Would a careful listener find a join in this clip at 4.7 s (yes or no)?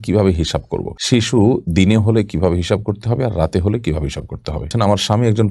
yes